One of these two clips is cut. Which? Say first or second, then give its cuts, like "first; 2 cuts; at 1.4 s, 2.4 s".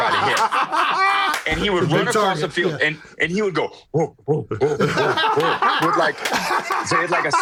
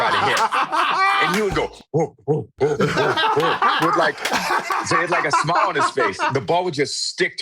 second; 2 cuts; at 1.3 s, 6.3 s